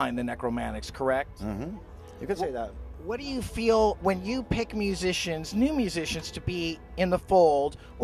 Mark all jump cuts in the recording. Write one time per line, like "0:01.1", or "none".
0:03.7